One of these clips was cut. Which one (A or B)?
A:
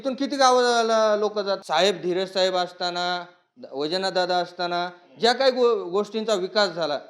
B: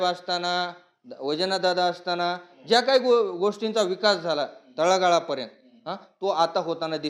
A